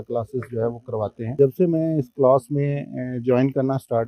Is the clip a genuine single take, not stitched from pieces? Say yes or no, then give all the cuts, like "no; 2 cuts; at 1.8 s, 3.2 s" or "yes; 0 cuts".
no; 1 cut; at 1.4 s